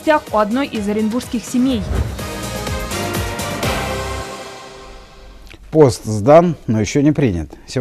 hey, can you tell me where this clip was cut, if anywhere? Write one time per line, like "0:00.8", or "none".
none

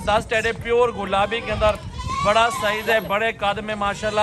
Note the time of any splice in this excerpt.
none

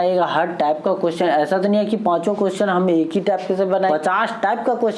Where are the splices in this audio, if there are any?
0:03.9

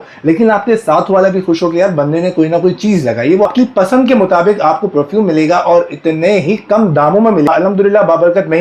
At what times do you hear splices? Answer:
0:03.5
0:07.5

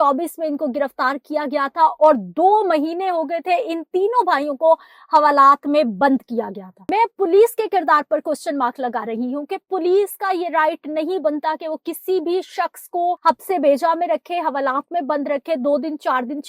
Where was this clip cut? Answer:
0:06.7
0:13.2

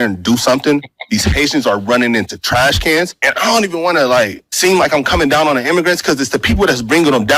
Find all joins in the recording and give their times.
0:03.2
0:04.4

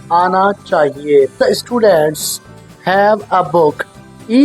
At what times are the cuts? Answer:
0:01.6

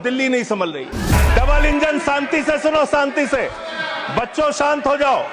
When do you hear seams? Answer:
0:01.1

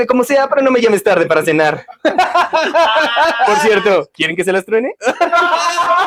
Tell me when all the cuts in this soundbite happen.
none

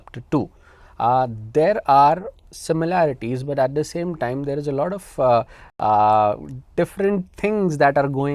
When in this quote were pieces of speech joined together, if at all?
none

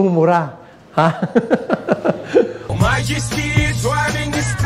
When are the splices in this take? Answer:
0:02.7

